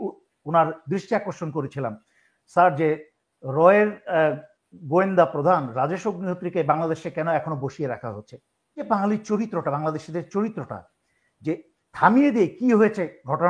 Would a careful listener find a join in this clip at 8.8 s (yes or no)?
yes